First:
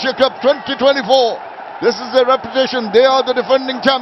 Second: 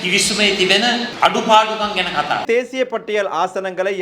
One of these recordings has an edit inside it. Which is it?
second; 1 cut; at 2.4 s

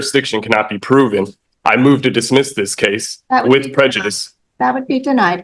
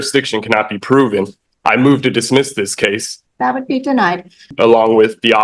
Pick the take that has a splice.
second; 2 cuts; at 3.1 s, 4.5 s

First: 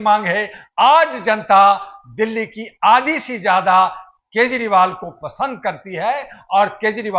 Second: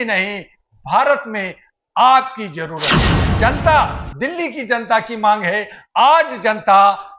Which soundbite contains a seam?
second; 1 cut; at 3.2 s

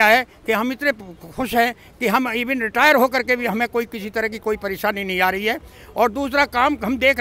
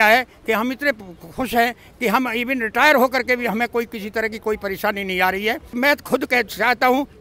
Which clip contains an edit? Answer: second; 1 cut; at 5.7 s

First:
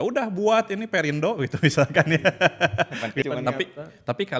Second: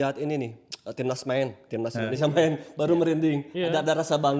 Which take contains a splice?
first; 1 cut; at 3.2 s

